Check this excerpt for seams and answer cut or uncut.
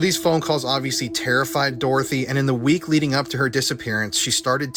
uncut